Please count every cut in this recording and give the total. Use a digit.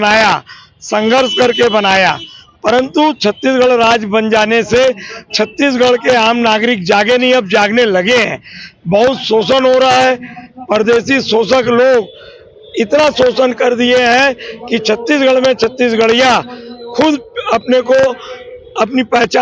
0